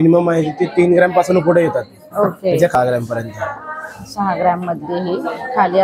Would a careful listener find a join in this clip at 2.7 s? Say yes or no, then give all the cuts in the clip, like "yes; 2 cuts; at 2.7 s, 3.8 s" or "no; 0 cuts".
yes; 1 cut; at 2.7 s